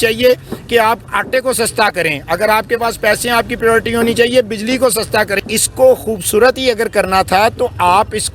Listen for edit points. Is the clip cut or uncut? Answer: cut